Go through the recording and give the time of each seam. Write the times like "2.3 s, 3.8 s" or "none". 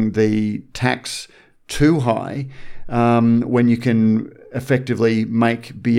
none